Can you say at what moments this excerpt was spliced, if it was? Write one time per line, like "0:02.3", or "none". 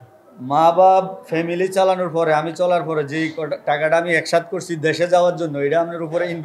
none